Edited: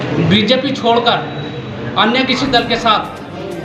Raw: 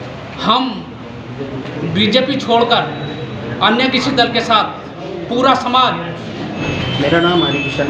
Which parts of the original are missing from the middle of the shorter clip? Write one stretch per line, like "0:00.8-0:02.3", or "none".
none